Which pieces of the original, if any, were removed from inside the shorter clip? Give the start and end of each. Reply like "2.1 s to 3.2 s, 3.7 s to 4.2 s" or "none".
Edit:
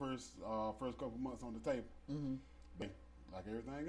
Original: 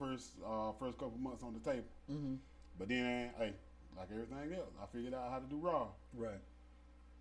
2.8 s to 3.5 s